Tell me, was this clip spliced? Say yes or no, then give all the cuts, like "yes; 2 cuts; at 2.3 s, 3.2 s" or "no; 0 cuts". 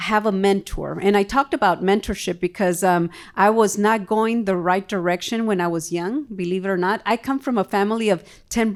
no; 0 cuts